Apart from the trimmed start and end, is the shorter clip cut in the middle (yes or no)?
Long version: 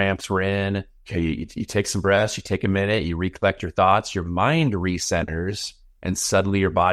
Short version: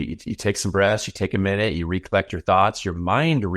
no